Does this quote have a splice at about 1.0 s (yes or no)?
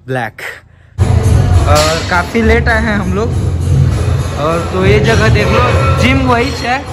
yes